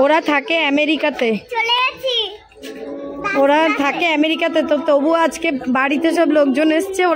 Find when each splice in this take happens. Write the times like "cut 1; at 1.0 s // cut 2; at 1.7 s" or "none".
none